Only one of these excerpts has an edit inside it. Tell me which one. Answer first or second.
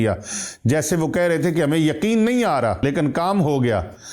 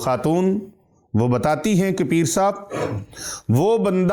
first